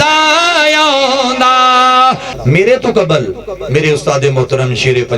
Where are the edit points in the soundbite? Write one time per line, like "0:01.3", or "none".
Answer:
0:02.3